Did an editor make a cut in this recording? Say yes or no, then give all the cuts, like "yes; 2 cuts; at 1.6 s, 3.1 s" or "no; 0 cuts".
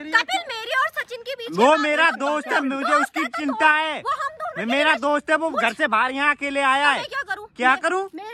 no; 0 cuts